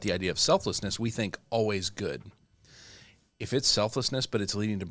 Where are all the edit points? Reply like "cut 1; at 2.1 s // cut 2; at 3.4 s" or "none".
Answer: none